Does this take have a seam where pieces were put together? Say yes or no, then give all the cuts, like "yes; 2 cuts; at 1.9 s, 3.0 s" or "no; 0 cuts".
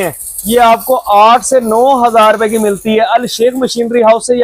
no; 0 cuts